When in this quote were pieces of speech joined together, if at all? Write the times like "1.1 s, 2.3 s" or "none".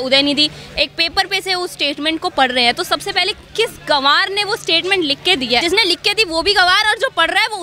5.6 s